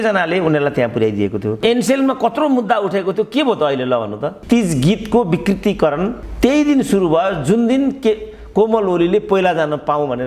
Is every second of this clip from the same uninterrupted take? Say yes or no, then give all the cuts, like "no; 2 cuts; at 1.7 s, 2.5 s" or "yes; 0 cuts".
no; 2 cuts; at 1.6 s, 4.4 s